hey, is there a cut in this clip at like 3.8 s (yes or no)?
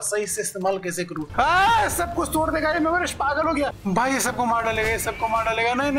yes